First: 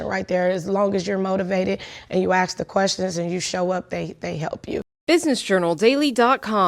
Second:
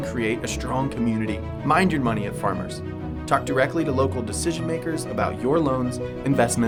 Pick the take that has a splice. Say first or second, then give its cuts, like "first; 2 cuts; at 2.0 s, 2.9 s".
first; 1 cut; at 4.9 s